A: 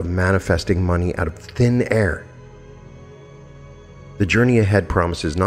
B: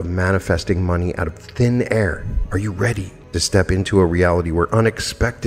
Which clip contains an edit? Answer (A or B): B